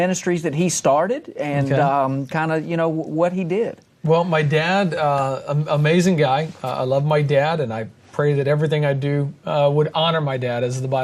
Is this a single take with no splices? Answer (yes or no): yes